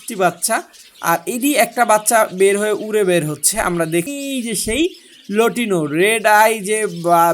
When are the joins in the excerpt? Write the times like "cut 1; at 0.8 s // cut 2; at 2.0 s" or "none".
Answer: cut 1; at 4.1 s